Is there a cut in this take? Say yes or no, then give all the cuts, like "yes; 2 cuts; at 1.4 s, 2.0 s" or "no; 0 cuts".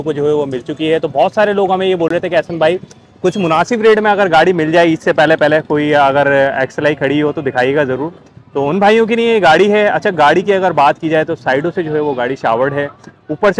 no; 0 cuts